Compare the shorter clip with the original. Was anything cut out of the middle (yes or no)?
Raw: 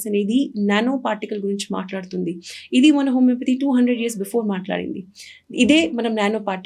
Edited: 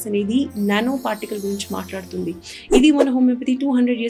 no